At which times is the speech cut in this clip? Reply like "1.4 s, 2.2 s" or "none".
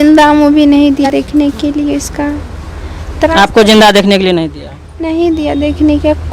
1.1 s

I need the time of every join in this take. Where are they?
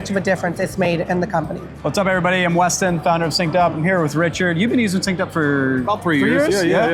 none

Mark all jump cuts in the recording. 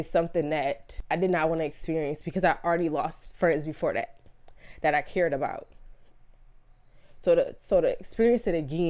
0.9 s

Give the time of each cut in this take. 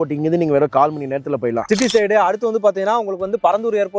1.7 s

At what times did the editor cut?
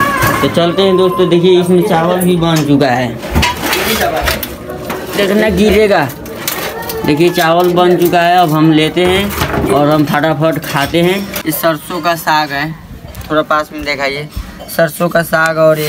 11.3 s

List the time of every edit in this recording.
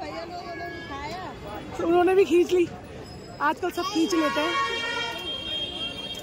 none

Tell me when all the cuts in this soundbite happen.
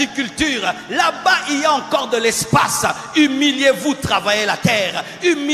none

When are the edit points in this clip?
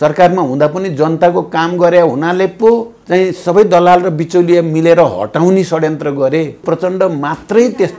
2.9 s, 6.6 s

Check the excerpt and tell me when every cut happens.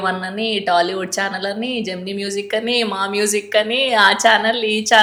none

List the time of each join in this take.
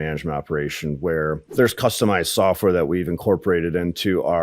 1.4 s

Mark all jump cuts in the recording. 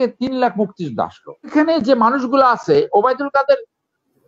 1.5 s

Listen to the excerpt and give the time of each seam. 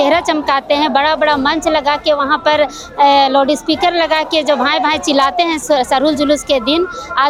none

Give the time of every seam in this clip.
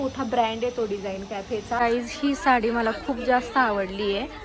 1.8 s

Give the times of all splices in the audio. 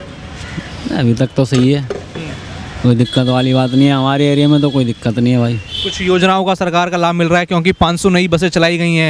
none

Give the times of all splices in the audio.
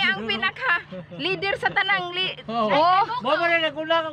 none

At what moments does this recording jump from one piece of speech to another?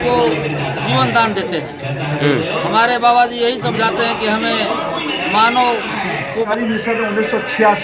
6.5 s

